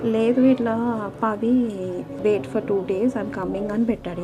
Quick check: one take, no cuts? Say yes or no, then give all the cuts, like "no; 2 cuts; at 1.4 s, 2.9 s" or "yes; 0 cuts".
no; 1 cut; at 2.1 s